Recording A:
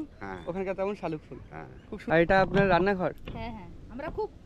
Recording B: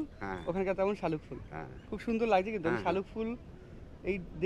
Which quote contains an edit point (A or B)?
A